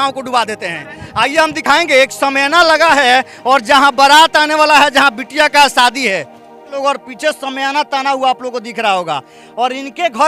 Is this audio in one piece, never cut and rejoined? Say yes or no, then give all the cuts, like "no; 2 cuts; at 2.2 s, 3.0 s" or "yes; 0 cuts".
yes; 0 cuts